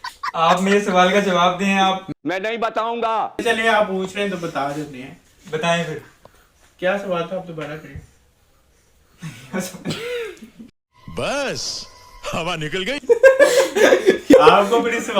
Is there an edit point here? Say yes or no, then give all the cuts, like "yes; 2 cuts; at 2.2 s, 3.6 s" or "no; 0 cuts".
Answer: no; 0 cuts